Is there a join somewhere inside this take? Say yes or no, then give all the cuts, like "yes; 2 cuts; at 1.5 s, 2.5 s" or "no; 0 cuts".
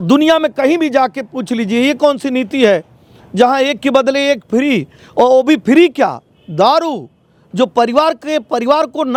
no; 0 cuts